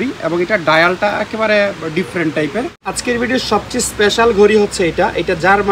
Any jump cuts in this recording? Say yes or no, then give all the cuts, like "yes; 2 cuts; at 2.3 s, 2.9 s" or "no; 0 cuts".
yes; 1 cut; at 2.9 s